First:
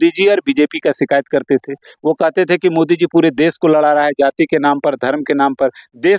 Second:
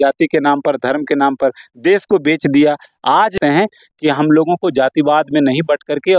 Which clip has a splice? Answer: second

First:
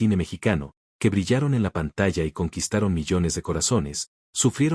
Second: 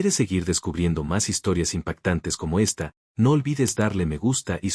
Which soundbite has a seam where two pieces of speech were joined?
first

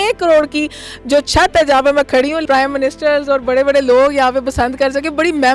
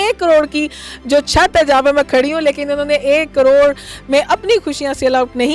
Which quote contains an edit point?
first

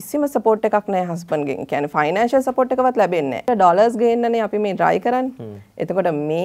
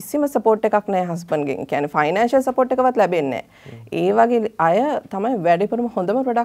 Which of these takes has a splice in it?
first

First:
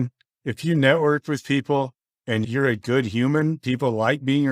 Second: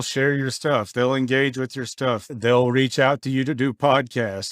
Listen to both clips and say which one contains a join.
second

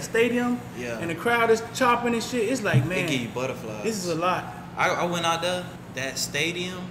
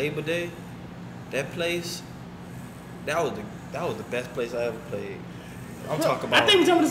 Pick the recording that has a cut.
first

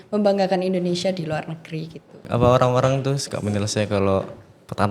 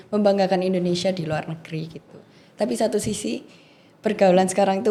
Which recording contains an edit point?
first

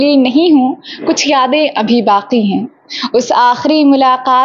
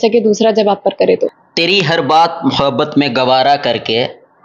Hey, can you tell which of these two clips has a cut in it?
second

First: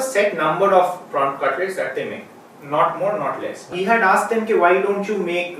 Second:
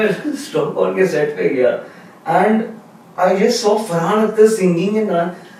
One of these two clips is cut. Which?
first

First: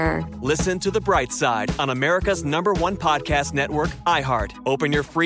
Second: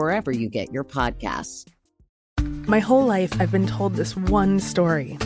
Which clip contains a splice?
second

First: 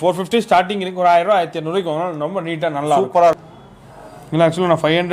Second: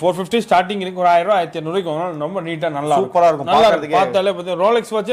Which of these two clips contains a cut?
first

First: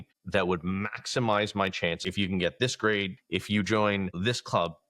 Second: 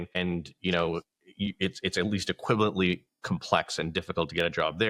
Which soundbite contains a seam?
first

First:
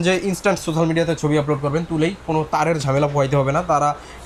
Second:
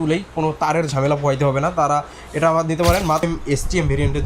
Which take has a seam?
second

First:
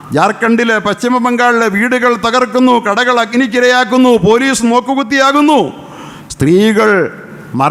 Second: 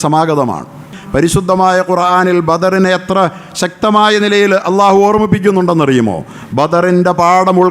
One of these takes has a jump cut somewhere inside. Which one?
second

